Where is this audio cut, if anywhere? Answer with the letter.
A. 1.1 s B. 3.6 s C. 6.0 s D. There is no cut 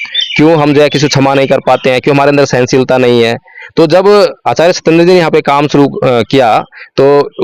D